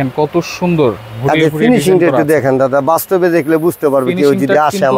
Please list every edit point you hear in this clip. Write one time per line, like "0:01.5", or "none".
none